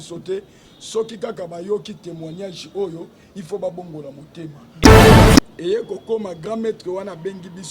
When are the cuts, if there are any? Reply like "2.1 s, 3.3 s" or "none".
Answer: 5.5 s